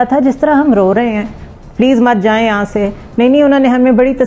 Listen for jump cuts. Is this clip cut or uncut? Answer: uncut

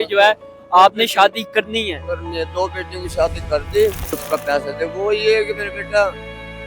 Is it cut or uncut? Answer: cut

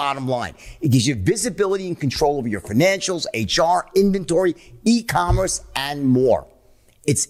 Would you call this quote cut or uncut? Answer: uncut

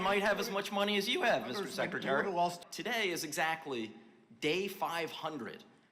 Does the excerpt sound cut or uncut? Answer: cut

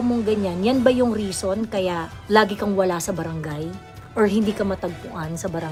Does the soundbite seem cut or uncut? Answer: uncut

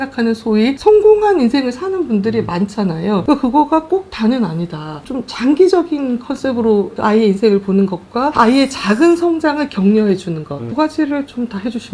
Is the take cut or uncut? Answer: uncut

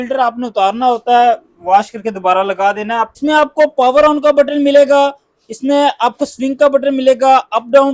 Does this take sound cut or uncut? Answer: cut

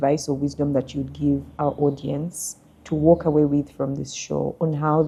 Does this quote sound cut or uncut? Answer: uncut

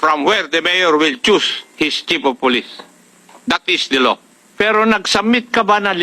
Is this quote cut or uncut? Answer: cut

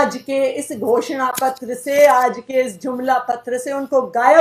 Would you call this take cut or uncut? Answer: uncut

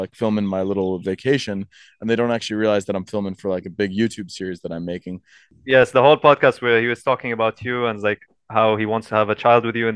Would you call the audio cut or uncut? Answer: cut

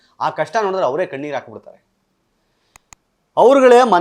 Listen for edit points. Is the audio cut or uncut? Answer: uncut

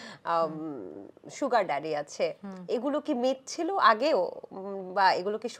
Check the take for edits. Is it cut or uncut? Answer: uncut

